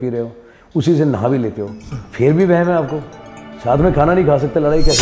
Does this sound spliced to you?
no; 0 cuts

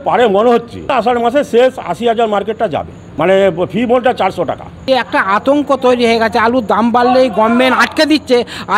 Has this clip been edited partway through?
yes; 3 cuts; at 0.9 s, 3.0 s, 4.8 s

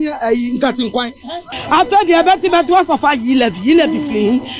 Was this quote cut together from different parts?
yes; 1 cut; at 1.4 s

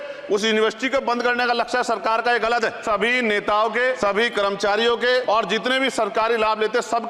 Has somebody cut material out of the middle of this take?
yes; 3 cuts; at 2.8 s, 4.0 s, 5.2 s

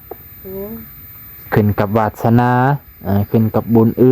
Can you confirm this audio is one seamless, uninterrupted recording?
no; 1 cut; at 1.3 s

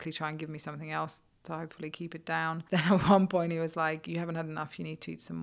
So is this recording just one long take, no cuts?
no; 1 cut; at 2.6 s

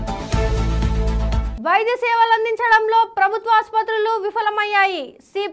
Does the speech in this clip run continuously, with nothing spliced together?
no; 1 cut; at 1.5 s

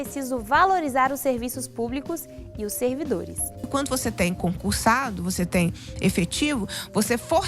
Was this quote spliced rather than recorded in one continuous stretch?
yes; 1 cut; at 3.6 s

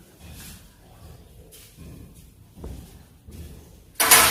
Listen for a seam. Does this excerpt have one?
no; 0 cuts

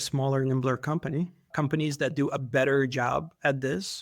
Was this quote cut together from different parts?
yes; 1 cut; at 1.5 s

